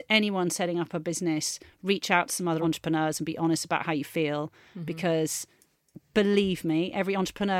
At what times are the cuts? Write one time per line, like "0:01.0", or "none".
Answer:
0:02.6